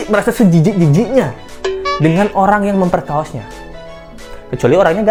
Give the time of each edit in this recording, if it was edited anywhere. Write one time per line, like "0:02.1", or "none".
none